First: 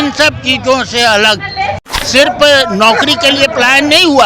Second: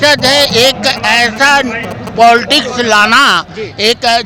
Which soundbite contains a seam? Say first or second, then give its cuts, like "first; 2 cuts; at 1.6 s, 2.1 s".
first; 1 cut; at 1.9 s